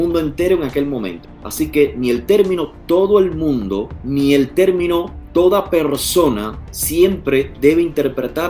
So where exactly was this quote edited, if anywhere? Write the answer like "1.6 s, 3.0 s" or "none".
1.2 s, 3.9 s

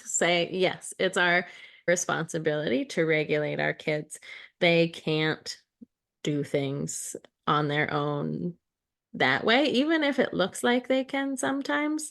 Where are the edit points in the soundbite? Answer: 1.9 s

